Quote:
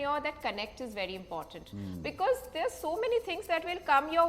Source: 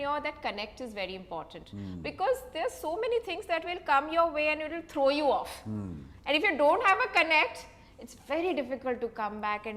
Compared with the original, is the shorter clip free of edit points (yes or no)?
yes